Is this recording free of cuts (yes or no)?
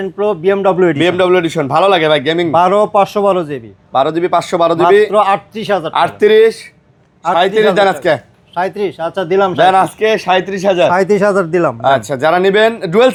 yes